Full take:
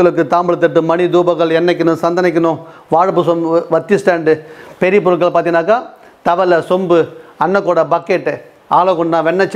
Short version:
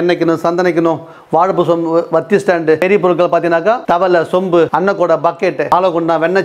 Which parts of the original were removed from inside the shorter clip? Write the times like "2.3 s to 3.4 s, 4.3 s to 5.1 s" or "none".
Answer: 4.4 s to 4.8 s, 5.8 s to 6.2 s, 7.1 s to 7.4 s, 8.4 s to 8.8 s